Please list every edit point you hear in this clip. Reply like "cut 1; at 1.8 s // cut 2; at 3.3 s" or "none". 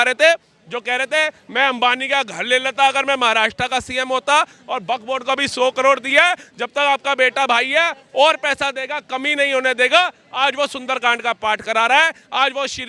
none